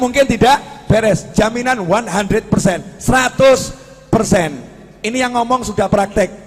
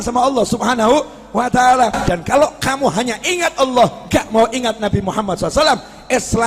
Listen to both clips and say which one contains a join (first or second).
second